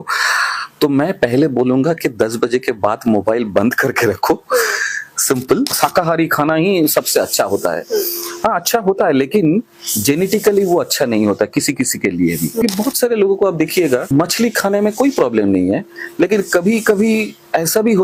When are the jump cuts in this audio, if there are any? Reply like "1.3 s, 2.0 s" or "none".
5.8 s, 12.6 s, 14.0 s